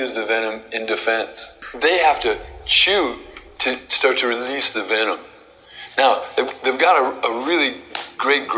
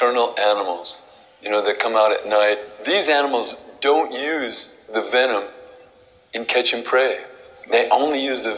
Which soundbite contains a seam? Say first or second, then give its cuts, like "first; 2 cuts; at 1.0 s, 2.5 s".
second; 1 cut; at 2.7 s